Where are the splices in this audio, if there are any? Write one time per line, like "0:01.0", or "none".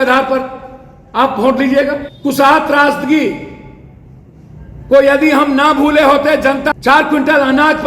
0:02.1
0:06.7